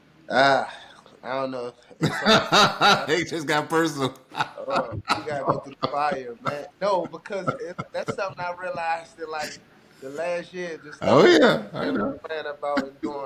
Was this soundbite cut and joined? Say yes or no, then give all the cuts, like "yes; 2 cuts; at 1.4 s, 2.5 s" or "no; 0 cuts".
no; 0 cuts